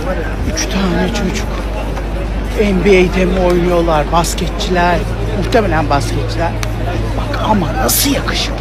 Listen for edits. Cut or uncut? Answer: uncut